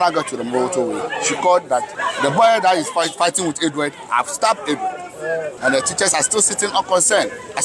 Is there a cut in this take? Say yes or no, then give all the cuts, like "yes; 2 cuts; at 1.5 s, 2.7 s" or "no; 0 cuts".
yes; 2 cuts; at 1.9 s, 5.5 s